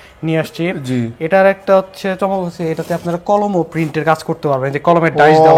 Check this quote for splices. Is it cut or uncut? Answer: uncut